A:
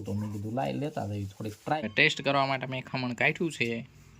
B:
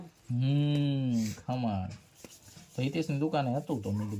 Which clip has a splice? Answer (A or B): A